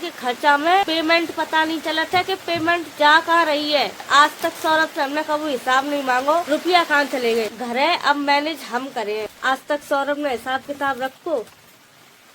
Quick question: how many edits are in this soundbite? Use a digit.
2